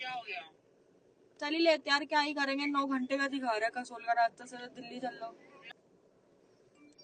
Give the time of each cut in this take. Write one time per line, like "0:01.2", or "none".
0:05.6

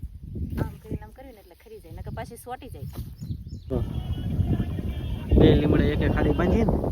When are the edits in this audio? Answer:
0:03.7

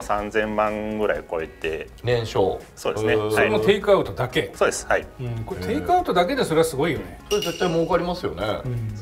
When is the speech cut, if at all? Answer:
none

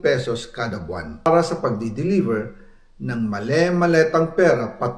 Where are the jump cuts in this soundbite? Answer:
0:01.2

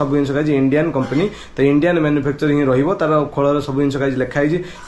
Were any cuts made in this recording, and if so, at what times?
none

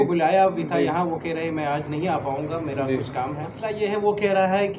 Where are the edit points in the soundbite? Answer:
0:03.6

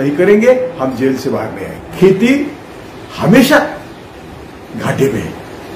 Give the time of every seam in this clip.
0:01.9

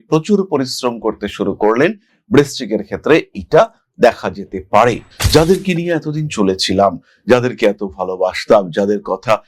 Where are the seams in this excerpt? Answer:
0:05.1

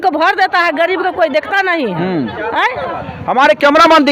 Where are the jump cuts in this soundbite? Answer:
none

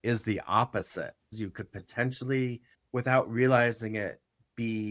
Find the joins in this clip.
0:01.2
0:02.7

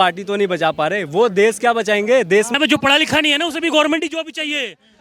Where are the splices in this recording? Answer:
0:02.5

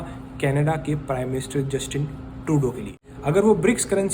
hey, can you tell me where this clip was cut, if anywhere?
0:03.0

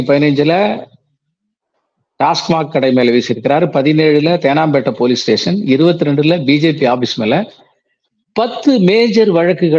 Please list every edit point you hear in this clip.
none

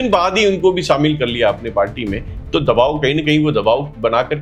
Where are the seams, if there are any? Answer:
none

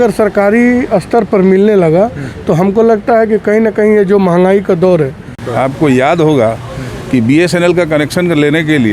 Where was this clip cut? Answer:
0:05.4

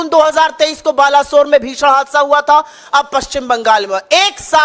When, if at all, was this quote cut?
none

